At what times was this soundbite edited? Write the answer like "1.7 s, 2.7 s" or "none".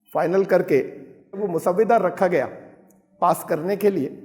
1.4 s